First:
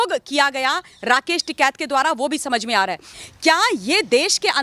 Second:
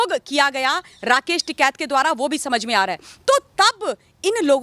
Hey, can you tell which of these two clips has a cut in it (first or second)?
first